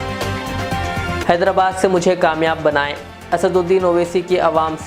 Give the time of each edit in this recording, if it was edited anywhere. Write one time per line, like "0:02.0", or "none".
0:01.2